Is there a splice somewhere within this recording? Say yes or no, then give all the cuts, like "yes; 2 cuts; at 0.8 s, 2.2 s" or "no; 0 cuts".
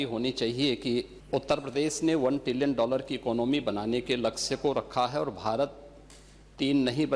yes; 1 cut; at 1.2 s